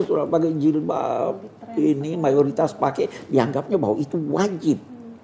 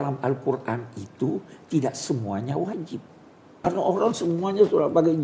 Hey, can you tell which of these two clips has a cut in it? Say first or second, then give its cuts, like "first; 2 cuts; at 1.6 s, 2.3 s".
second; 1 cut; at 3.7 s